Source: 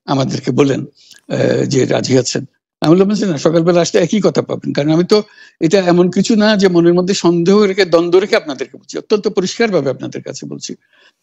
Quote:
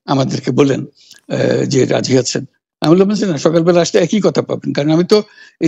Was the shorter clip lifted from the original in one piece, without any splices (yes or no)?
yes